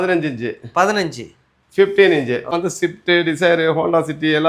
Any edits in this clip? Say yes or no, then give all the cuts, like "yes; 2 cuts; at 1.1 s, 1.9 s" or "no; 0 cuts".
yes; 1 cut; at 2.6 s